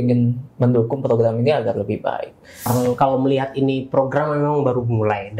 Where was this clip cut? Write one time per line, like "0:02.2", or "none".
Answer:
0:02.7